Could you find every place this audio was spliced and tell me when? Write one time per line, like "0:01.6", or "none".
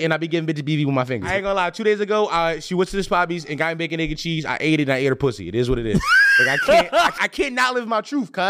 0:01.3
0:07.2